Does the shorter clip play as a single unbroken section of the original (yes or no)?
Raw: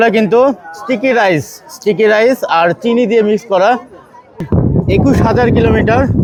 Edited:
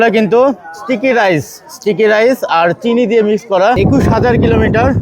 no